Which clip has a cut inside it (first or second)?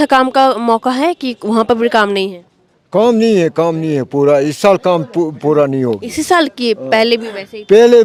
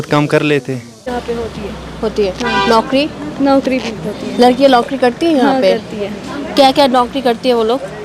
second